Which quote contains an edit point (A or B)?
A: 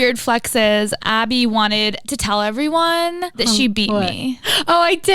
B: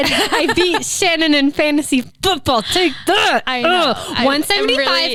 A